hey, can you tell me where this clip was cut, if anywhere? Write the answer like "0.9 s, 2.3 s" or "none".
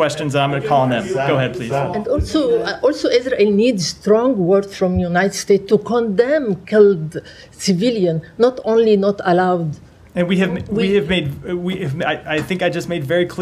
2.0 s